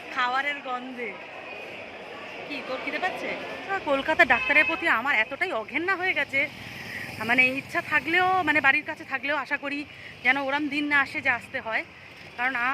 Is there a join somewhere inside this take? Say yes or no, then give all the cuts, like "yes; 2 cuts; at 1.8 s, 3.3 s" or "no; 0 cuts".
yes; 1 cut; at 3.7 s